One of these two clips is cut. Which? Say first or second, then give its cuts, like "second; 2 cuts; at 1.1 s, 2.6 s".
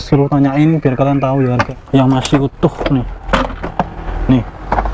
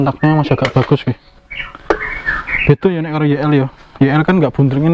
first; 1 cut; at 1.7 s